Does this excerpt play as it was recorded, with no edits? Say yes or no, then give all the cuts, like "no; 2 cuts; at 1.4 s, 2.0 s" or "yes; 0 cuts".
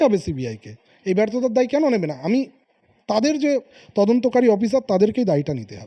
yes; 0 cuts